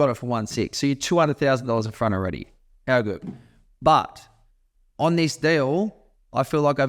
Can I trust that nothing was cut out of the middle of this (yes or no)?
yes